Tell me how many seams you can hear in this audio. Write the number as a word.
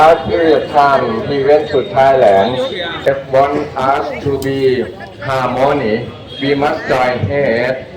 one